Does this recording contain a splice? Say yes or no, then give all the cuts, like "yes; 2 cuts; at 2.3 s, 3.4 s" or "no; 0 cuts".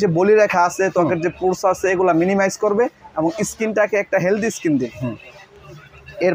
no; 0 cuts